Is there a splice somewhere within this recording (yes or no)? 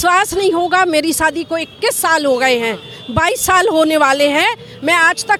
no